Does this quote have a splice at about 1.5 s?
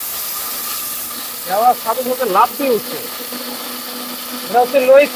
no; 0 cuts

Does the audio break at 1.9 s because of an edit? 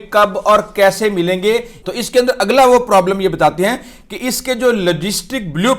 yes; 1 cut; at 1.9 s

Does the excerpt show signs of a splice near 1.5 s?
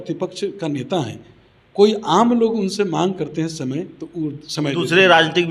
no; 0 cuts

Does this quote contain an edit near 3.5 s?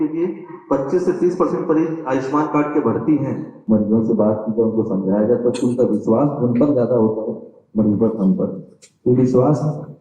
yes; 1 cut; at 3.5 s

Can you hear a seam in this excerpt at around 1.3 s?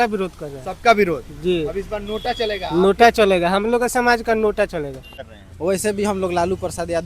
no; 1 cut; at 5.2 s

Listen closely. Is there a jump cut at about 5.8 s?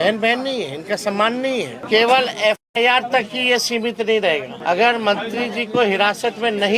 no; 2 cuts; at 1.8 s, 4.5 s

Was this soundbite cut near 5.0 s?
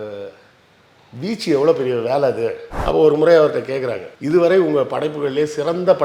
no; 1 cut; at 2.7 s

